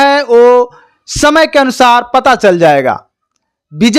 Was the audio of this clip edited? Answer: no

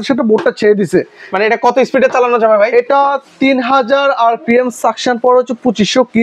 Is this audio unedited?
yes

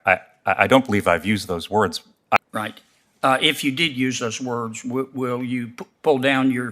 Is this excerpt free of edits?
no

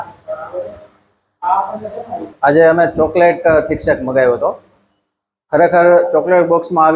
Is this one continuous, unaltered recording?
no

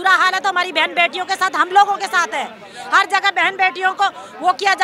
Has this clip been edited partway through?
no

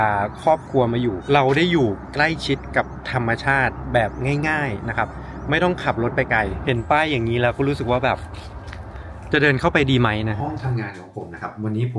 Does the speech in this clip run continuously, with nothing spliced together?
no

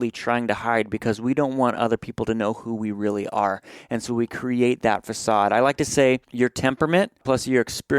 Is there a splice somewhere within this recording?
yes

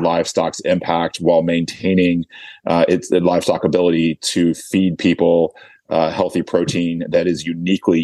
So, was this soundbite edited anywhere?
no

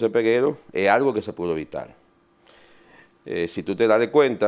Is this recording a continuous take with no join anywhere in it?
yes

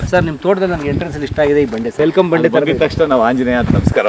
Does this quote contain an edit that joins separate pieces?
yes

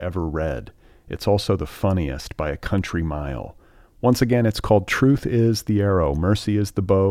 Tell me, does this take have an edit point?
no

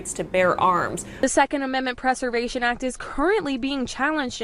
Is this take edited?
no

